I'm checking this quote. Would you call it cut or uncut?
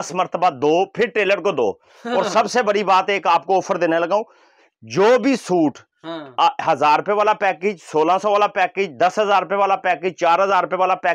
uncut